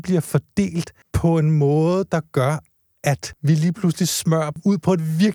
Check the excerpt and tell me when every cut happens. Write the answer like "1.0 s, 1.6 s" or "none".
1.0 s, 3.3 s, 4.6 s